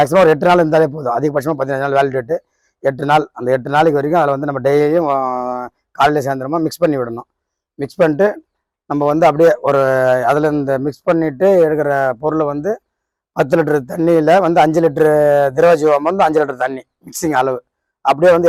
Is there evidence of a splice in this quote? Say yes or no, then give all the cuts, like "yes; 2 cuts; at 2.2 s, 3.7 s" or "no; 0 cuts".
no; 0 cuts